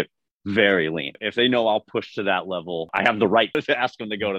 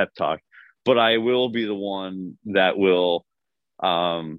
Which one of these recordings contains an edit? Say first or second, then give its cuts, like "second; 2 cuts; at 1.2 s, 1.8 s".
first; 3 cuts; at 1.1 s, 2.9 s, 3.6 s